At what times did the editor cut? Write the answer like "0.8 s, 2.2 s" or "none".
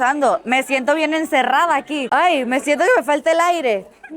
2.0 s